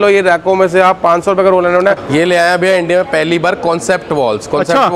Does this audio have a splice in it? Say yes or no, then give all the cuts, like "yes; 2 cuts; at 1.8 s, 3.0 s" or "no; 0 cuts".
yes; 1 cut; at 2.0 s